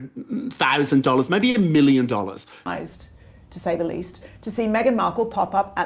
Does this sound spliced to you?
yes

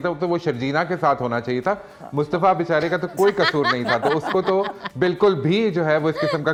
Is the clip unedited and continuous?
yes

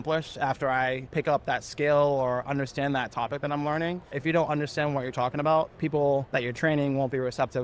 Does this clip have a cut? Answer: yes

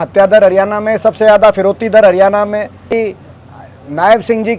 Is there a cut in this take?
yes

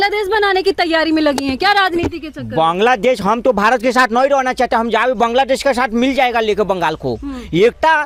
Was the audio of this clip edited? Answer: no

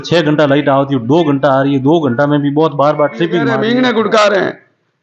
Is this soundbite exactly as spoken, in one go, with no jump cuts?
no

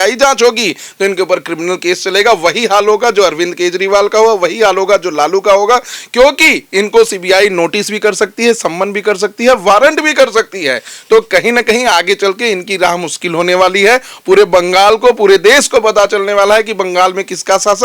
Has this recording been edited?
no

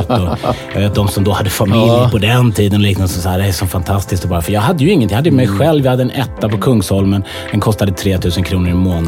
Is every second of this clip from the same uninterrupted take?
yes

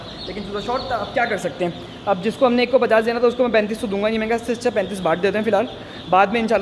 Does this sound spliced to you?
no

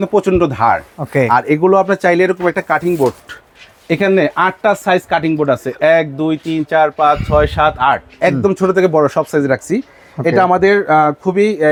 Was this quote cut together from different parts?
no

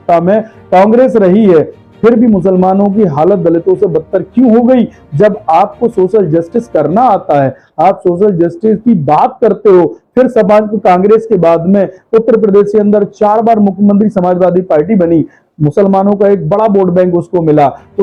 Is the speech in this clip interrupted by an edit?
no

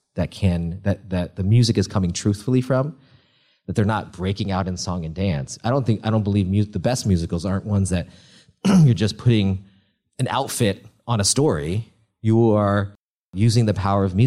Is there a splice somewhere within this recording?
yes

